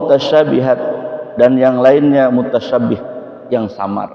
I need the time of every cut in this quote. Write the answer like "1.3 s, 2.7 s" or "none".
none